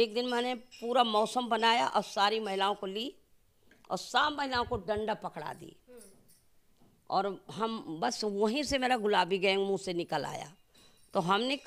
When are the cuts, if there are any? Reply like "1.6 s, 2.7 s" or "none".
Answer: none

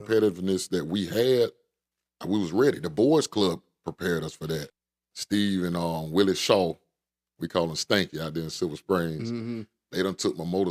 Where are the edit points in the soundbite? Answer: 4.8 s

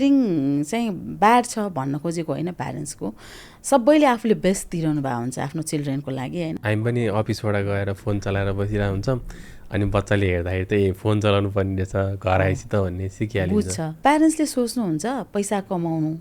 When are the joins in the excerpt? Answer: 6.9 s, 13.9 s

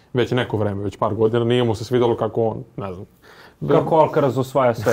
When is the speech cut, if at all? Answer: none

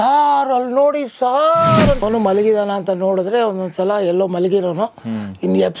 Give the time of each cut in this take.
2.0 s

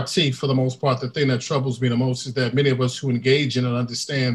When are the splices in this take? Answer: none

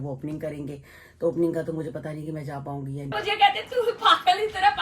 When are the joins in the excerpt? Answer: 3.1 s

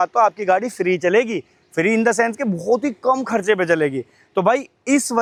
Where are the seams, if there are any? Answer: none

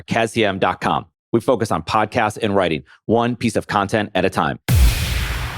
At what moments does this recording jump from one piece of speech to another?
4.7 s

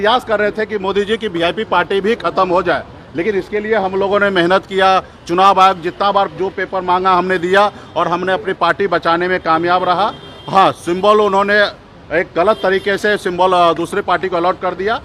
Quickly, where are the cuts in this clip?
none

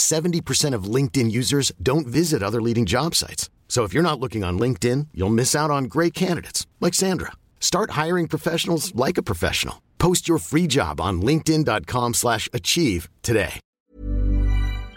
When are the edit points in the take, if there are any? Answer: 13.6 s

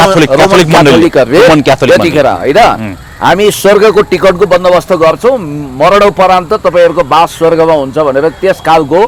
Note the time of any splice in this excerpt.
none

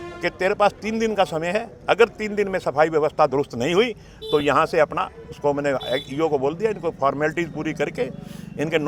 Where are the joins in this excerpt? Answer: none

